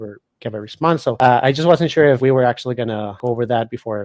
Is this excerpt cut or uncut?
cut